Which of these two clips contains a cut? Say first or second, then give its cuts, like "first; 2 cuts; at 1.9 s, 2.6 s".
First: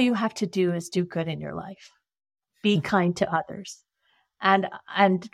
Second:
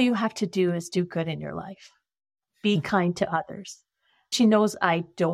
second; 1 cut; at 4.3 s